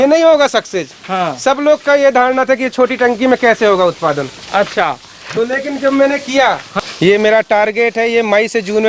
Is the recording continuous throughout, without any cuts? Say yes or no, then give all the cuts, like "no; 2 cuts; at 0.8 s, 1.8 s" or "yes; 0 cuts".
no; 1 cut; at 6.7 s